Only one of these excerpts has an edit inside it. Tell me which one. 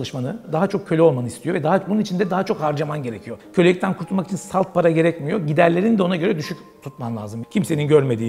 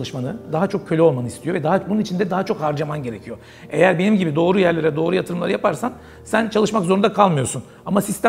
first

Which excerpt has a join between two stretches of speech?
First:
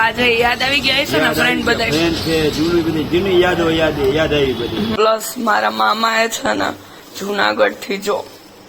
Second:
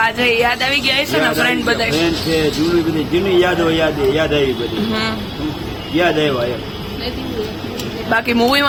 first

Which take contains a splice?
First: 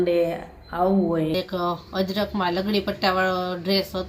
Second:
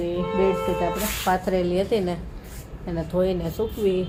first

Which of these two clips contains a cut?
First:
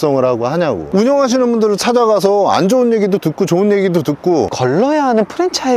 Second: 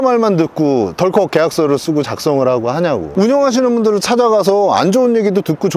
first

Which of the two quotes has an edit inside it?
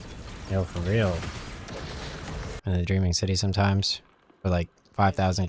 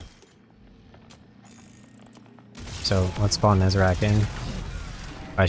first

